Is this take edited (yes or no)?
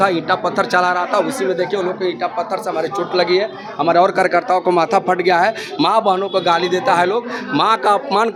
no